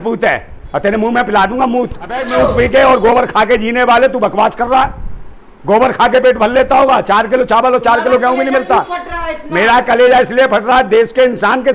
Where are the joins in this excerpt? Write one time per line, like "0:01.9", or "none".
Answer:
0:02.3